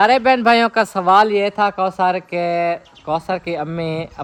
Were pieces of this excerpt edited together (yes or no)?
no